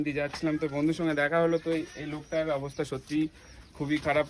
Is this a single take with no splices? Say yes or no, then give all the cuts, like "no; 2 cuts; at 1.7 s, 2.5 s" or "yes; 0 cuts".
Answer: yes; 0 cuts